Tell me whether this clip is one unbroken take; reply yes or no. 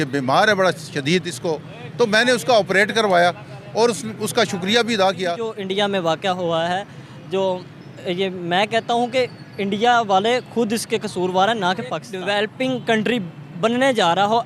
no